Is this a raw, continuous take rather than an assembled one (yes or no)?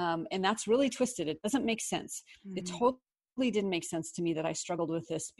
yes